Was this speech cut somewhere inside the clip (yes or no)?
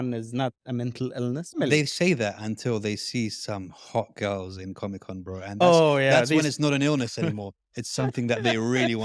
yes